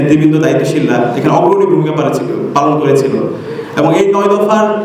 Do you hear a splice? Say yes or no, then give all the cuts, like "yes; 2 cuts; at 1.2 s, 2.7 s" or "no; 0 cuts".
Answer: no; 0 cuts